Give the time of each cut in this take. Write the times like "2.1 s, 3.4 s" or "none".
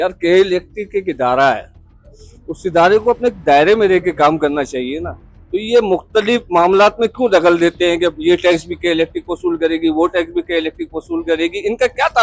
none